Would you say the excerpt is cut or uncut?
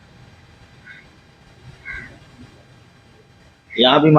uncut